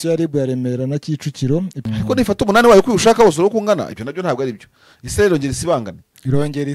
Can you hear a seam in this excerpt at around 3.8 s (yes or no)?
no